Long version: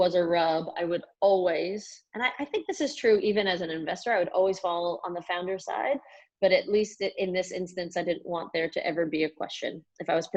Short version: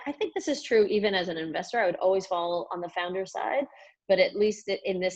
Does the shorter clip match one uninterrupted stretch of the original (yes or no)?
yes